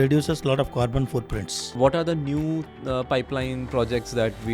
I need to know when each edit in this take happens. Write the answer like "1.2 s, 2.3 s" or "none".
1.7 s